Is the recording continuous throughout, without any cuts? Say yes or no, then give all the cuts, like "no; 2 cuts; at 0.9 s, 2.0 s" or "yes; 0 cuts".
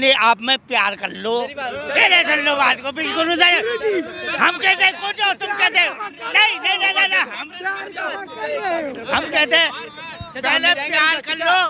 yes; 0 cuts